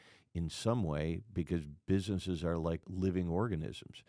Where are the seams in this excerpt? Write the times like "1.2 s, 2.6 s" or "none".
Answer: 2.9 s